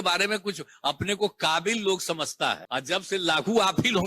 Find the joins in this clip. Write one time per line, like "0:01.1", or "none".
0:02.6